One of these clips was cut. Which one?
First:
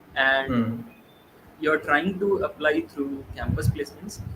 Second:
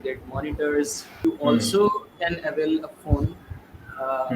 second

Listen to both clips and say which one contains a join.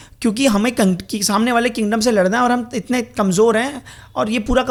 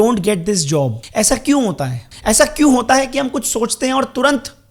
second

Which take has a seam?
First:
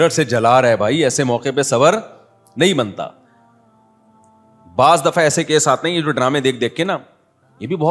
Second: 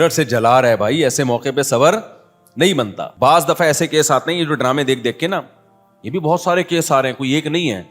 second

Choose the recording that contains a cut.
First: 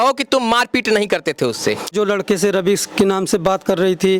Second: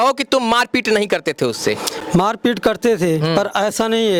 first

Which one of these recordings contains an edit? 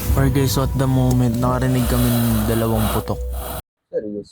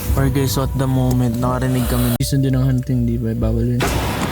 first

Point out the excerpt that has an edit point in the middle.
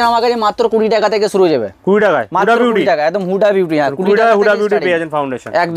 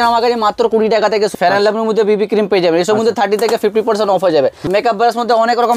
second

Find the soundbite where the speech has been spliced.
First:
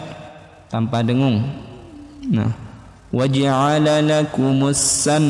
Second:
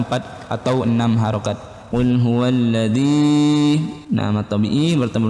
second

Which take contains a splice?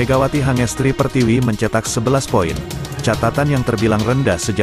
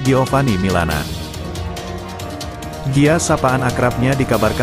second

